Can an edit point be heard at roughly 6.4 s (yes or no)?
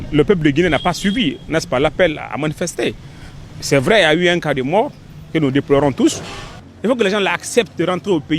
yes